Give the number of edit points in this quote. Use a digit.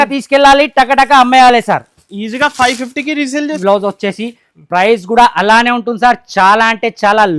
1